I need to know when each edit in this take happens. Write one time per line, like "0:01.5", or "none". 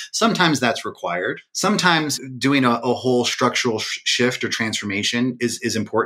0:01.5
0:02.1